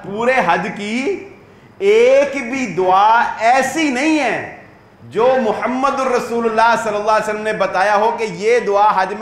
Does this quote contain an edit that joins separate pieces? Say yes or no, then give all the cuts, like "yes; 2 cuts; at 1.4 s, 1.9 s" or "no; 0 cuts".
no; 0 cuts